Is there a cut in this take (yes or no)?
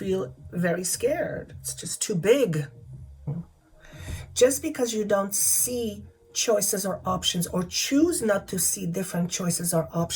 yes